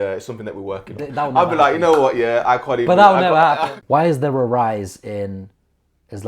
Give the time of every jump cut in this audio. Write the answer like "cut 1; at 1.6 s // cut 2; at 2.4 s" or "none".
cut 1; at 3.7 s